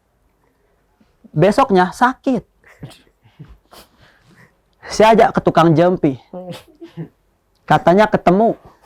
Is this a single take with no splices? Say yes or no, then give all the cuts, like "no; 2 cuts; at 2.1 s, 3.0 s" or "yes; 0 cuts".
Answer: yes; 0 cuts